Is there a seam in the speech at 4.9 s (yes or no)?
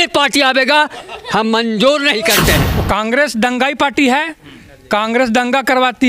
no